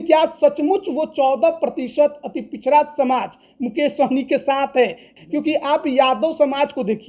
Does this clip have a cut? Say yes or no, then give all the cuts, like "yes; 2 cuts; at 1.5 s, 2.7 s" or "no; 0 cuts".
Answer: yes; 1 cut; at 5.0 s